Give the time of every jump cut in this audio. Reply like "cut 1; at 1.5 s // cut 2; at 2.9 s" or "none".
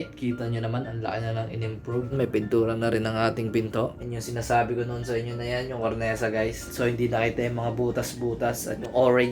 cut 1; at 3.9 s